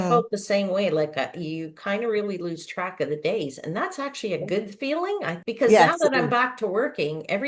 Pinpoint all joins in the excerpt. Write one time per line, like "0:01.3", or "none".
0:05.3